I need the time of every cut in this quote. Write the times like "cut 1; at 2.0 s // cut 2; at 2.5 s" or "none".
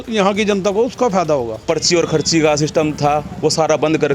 cut 1; at 1.6 s